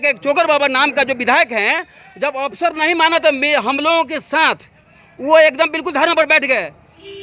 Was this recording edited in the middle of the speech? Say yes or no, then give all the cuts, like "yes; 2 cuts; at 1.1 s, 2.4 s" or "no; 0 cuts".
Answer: no; 0 cuts